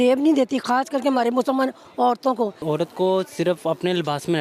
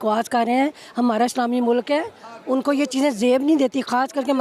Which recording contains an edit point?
first; 1 cut; at 2.6 s

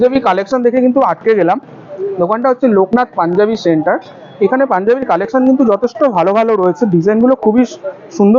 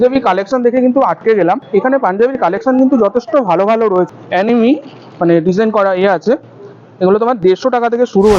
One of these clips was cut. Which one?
second; 2 cuts; at 1.6 s, 4.1 s

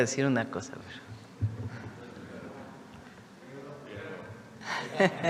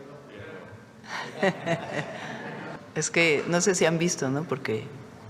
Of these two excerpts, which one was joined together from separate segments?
second; 1 cut; at 2.7 s

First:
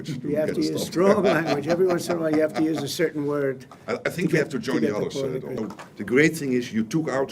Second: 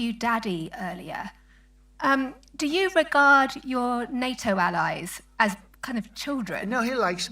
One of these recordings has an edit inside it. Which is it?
first; 1 cut; at 5.6 s

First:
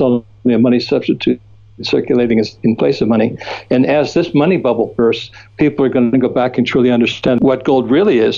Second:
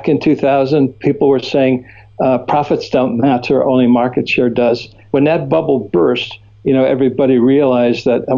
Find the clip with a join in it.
first; 1 cut; at 7.4 s

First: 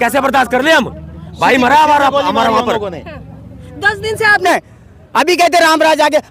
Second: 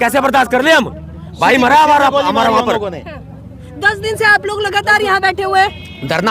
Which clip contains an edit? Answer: first; 1 cut; at 4.4 s

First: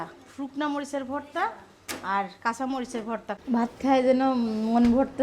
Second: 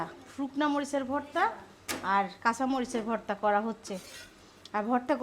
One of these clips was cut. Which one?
first; 1 cut; at 3.4 s

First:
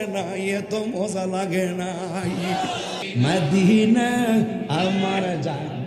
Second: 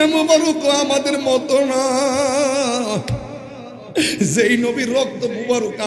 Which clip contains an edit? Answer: first; 1 cut; at 3.0 s

